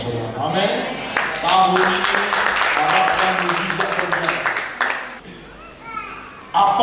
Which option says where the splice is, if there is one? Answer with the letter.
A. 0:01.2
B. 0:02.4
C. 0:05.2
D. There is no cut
C